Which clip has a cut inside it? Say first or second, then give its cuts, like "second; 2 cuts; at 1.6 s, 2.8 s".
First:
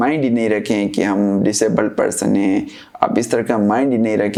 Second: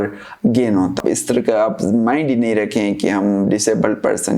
second; 1 cut; at 1.0 s